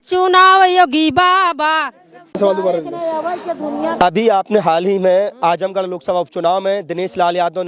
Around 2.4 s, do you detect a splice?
no; 0 cuts

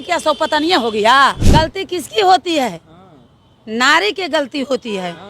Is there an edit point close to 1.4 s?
yes; 1 cut; at 1.4 s

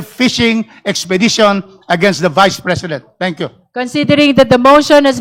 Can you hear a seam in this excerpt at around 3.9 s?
no; 0 cuts

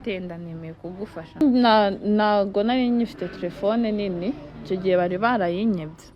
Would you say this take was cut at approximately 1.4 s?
yes; 1 cut; at 1.4 s

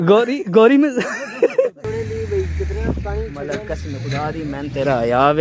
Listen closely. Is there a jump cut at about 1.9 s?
yes; 1 cut; at 1.9 s

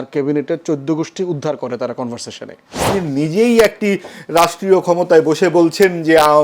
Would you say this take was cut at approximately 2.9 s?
yes; 1 cut; at 2.9 s

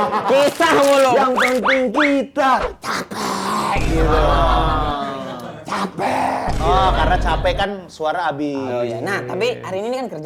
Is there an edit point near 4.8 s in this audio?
no; 1 cut; at 1.1 s

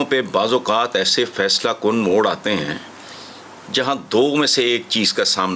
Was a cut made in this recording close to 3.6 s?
no; 0 cuts

